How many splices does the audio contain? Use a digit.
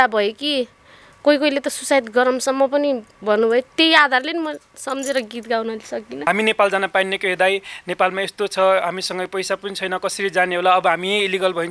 1